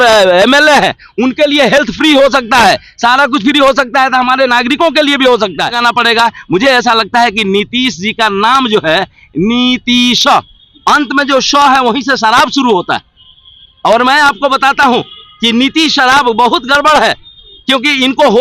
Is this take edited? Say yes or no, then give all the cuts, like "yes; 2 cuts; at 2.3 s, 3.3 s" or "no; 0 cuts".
yes; 1 cut; at 5.8 s